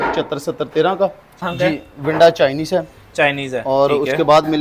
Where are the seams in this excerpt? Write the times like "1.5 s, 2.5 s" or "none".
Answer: 1.4 s